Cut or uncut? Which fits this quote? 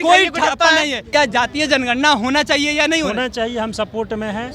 cut